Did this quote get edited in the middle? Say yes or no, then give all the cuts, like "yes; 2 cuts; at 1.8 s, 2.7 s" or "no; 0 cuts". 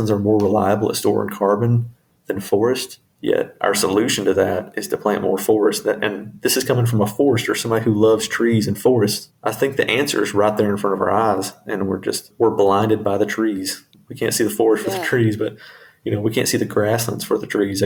no; 0 cuts